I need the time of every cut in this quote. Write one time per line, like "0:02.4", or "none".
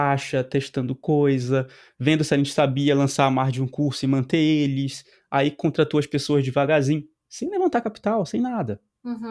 none